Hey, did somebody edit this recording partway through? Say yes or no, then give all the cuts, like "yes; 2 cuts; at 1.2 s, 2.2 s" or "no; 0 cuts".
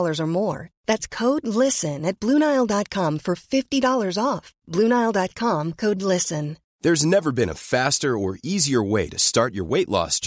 no; 0 cuts